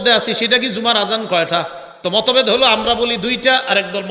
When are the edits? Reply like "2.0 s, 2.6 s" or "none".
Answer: none